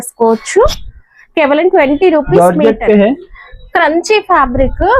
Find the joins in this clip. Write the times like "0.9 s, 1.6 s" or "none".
2.4 s